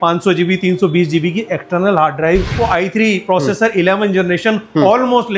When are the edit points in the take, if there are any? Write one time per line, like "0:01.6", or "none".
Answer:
0:02.5